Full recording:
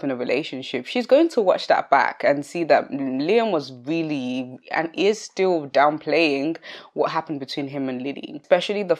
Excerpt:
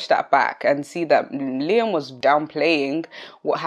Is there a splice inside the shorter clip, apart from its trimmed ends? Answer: yes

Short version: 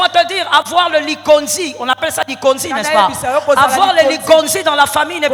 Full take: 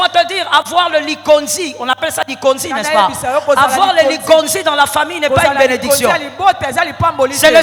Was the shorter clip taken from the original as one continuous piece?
yes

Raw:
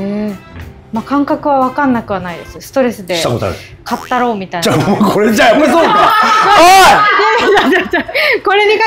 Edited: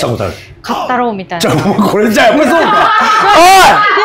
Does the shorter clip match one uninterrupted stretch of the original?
yes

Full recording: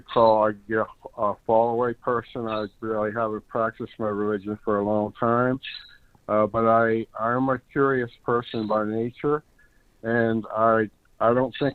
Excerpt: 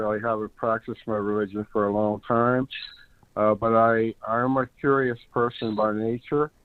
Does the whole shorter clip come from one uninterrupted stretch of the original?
yes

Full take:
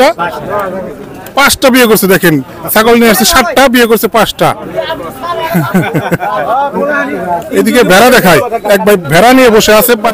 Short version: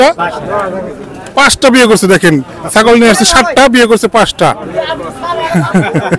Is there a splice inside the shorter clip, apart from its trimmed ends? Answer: no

